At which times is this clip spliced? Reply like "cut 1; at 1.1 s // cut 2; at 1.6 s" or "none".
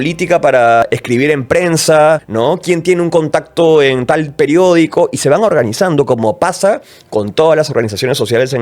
cut 1; at 0.8 s // cut 2; at 2.3 s